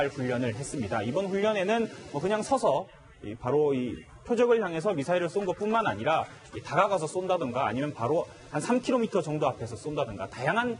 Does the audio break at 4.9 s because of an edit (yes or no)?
no